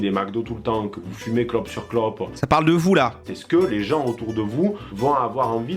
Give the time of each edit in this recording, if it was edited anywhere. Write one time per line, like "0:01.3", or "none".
0:02.4
0:03.2